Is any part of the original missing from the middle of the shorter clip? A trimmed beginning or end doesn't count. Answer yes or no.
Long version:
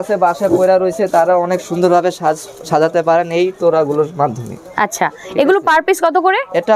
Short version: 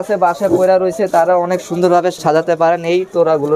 yes